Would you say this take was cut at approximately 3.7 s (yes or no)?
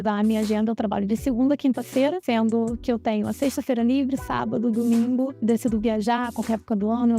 no